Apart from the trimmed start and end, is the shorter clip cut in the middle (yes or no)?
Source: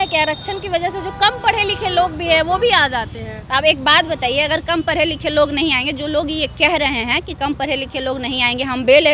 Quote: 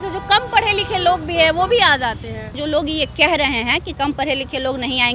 yes